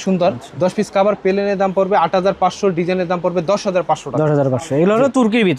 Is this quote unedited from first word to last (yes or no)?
yes